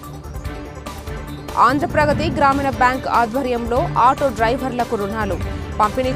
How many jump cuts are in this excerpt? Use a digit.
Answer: 1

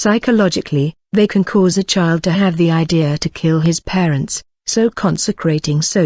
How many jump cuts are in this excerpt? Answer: 1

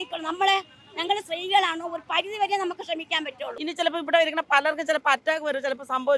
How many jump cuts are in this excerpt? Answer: 1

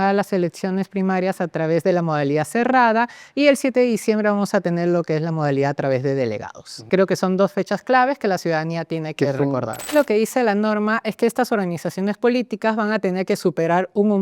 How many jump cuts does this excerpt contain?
2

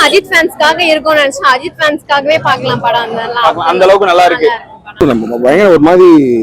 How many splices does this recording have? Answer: 1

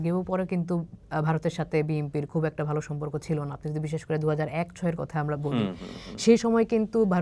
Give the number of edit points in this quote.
0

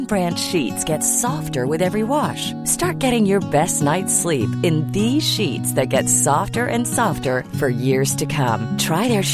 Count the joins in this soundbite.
0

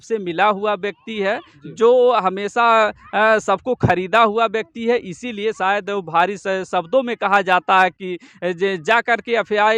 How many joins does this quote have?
0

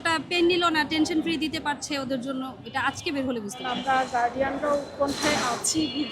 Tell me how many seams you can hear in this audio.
1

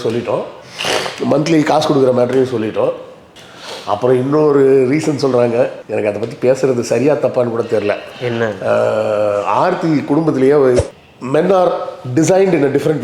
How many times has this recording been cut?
1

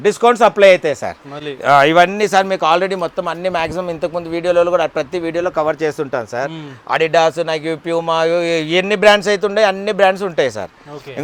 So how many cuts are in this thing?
0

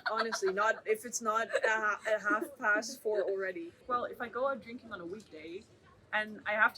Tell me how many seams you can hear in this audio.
1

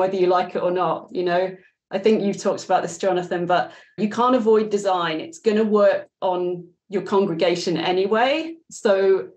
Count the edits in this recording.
1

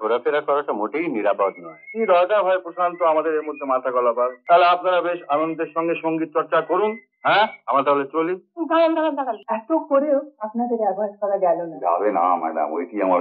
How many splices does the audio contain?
2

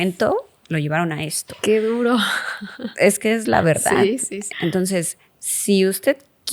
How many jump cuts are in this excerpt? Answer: 1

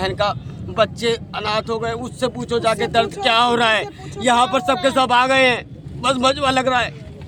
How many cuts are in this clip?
0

